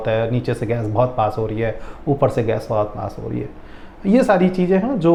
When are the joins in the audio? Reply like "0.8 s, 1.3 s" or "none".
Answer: none

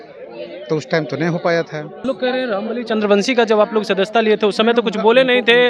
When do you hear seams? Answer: 2.1 s

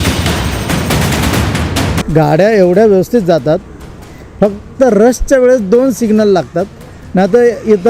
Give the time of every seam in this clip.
2.0 s

